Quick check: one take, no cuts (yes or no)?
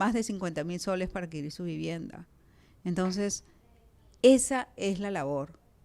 yes